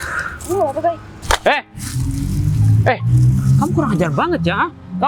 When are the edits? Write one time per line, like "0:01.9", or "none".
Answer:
0:01.1